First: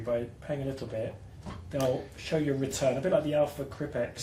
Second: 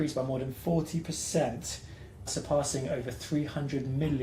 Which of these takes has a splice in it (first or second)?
second